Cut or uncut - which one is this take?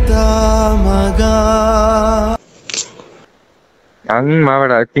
cut